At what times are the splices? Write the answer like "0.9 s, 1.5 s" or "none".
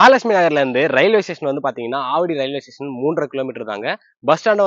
none